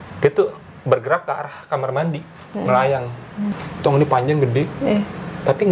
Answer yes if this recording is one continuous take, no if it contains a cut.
no